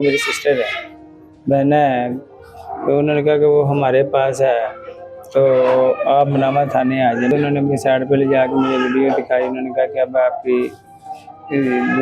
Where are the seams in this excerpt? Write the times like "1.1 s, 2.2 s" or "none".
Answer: 7.3 s